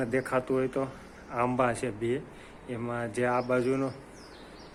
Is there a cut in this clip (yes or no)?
no